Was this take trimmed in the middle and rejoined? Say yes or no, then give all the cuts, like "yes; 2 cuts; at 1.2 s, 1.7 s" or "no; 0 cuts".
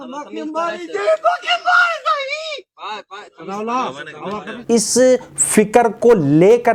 no; 0 cuts